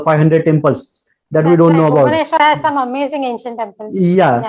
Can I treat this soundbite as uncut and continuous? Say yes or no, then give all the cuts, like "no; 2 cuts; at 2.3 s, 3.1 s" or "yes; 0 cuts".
yes; 0 cuts